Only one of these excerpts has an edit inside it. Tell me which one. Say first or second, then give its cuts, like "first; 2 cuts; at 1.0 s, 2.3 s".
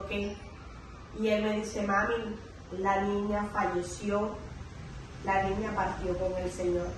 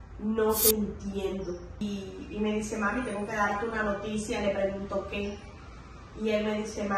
second; 1 cut; at 1.8 s